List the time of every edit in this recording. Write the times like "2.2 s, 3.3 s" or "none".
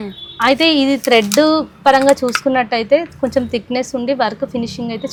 none